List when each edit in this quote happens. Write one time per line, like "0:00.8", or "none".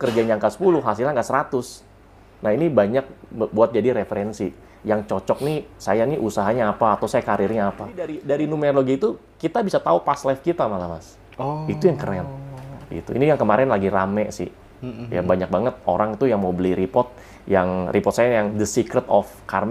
0:08.2